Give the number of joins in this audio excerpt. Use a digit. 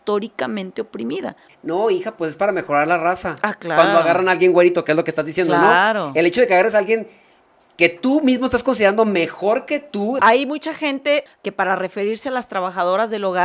3